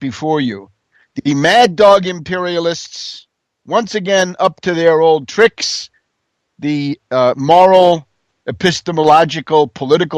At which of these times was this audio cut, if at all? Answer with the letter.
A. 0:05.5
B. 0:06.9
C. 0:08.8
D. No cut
A